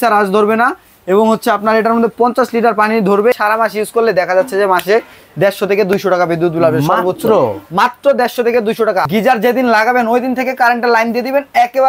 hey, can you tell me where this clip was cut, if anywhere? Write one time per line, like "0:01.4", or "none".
0:03.3
0:09.1